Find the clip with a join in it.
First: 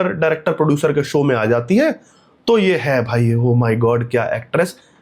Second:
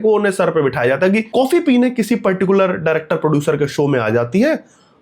second; 1 cut; at 1.3 s

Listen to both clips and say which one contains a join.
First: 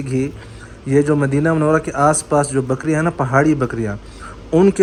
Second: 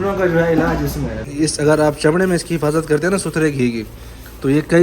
second; 1 cut; at 1.2 s

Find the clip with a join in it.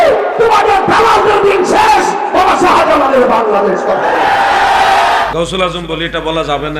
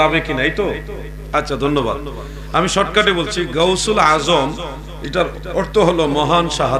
first; 1 cut; at 5.3 s

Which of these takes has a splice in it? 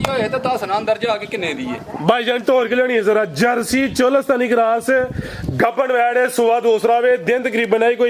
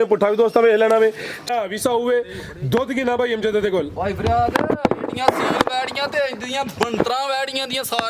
second; 1 cut; at 1.4 s

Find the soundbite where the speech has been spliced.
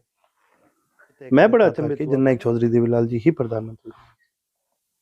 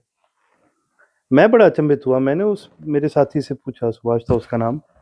first; 1 cut; at 1.9 s

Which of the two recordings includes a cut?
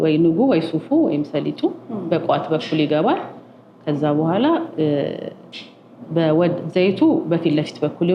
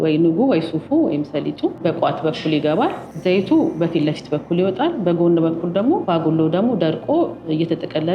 second; 3 cuts; at 1.8 s, 3.1 s, 6.0 s

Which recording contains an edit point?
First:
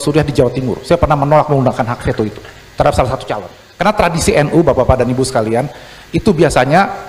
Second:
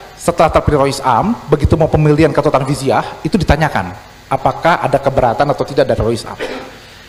first; 1 cut; at 3.6 s

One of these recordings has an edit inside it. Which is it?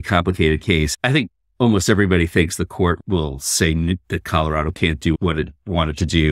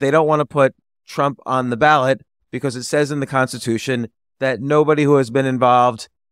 first; 3 cuts; at 0.9 s, 3.0 s, 5.2 s

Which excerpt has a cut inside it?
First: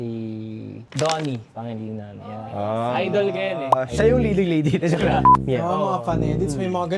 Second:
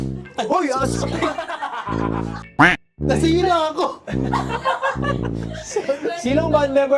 first; 1 cut; at 5.2 s

